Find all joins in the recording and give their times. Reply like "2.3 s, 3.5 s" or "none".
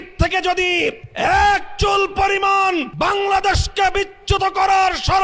1.1 s, 2.9 s